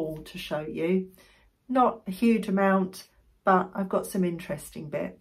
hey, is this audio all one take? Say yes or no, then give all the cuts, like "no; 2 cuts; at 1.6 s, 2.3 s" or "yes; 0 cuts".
yes; 0 cuts